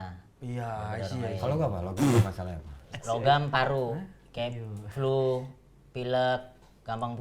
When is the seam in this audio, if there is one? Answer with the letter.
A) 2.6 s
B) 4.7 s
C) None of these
C